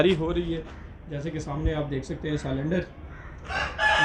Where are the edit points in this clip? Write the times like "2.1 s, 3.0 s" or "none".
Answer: none